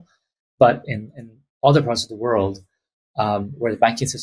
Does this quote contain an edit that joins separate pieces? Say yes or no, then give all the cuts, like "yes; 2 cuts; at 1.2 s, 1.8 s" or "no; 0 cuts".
no; 0 cuts